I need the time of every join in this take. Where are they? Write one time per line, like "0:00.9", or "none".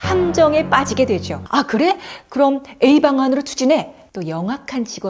0:01.4
0:04.0

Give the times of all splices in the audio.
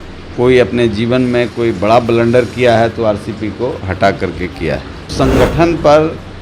0:05.1

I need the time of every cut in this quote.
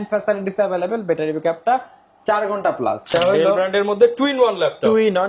0:03.0

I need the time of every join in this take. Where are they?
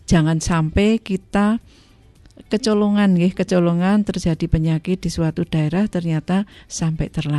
none

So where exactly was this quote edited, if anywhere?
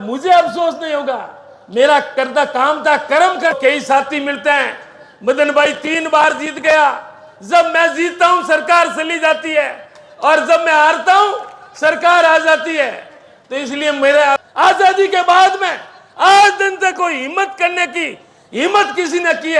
0:03.6
0:14.4

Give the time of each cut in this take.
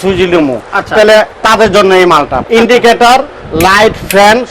0:02.4

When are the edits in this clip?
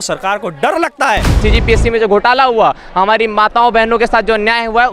0:01.4

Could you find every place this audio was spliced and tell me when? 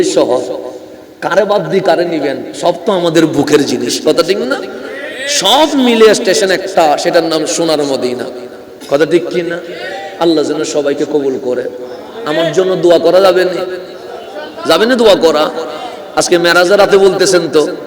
none

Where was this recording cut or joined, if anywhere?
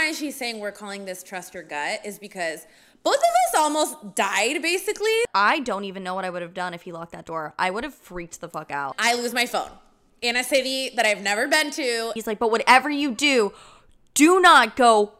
0:05.3
0:09.0
0:12.2

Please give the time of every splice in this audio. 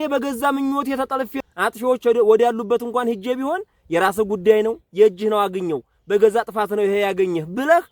0:01.4

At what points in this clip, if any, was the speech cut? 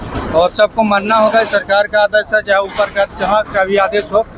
none

